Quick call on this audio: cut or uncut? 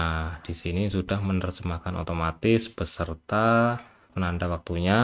cut